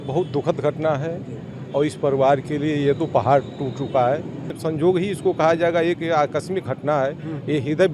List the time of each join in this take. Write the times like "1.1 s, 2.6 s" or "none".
4.6 s